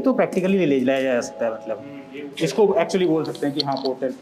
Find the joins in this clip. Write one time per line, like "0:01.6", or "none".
none